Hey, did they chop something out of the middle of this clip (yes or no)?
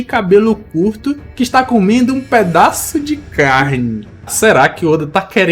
yes